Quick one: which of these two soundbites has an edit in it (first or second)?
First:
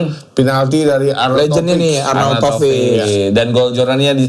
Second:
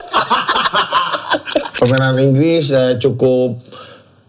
second